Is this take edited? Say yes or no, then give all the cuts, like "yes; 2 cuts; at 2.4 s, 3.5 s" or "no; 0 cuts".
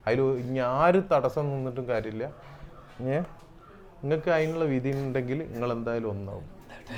no; 0 cuts